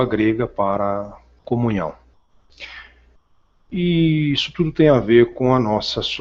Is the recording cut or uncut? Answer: cut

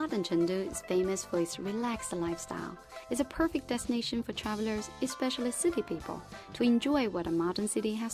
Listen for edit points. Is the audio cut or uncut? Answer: cut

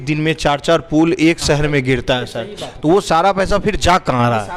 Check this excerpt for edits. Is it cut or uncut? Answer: uncut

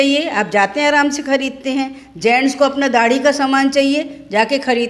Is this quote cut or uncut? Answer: uncut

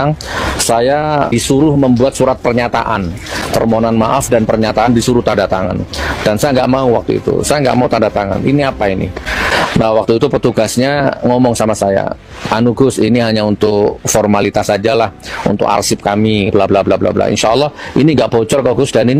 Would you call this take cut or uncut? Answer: uncut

